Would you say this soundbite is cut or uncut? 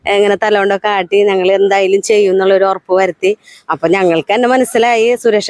uncut